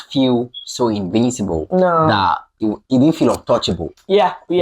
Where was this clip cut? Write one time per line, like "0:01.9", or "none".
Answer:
none